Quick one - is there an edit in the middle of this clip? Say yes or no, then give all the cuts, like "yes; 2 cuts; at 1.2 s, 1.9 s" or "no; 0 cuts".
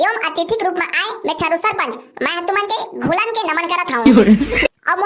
no; 0 cuts